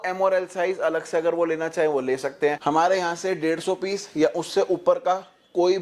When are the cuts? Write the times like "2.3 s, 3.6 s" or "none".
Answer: 2.6 s